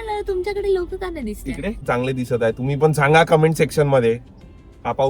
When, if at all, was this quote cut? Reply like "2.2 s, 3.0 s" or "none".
1.8 s